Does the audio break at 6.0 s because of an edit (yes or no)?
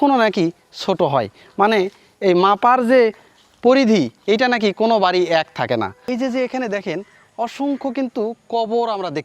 yes